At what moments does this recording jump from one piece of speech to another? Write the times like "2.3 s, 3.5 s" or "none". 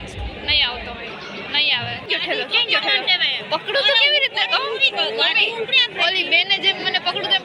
2.0 s